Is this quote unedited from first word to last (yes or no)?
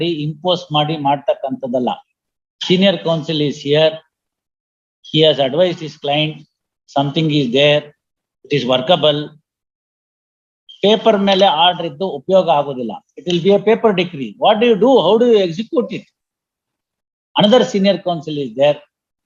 yes